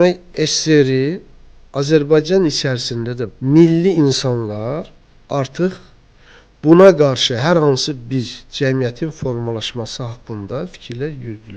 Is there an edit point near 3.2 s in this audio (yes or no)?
yes